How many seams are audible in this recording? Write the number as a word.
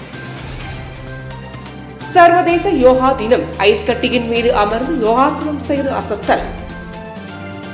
one